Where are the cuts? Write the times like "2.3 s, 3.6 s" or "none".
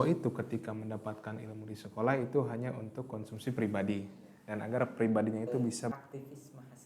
5.9 s